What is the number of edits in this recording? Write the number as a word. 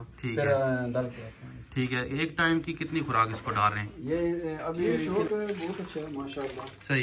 one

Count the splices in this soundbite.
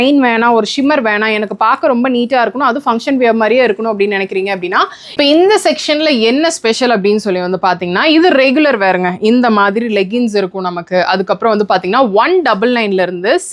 one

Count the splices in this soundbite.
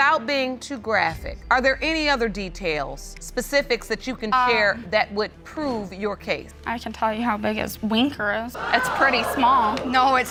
zero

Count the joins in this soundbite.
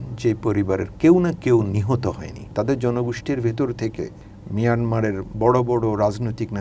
one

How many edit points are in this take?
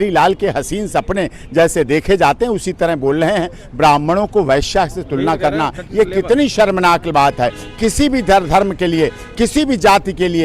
zero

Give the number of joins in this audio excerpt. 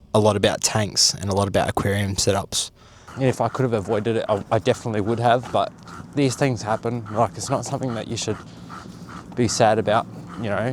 one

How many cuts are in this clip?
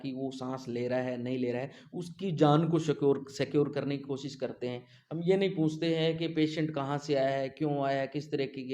zero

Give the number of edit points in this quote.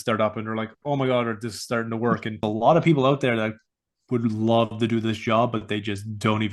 one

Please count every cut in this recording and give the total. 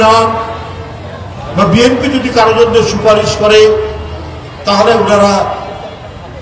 zero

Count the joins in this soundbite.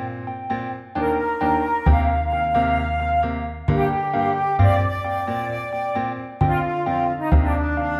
two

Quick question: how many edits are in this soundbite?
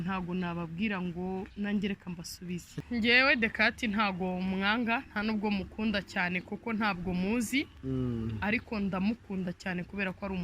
one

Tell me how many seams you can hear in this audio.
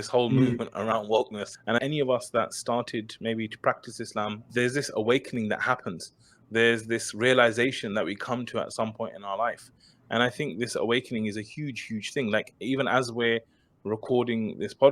two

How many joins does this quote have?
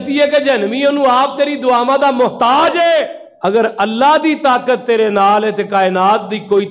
one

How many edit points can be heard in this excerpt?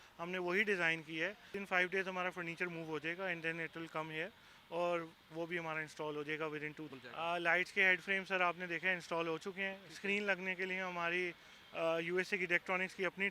two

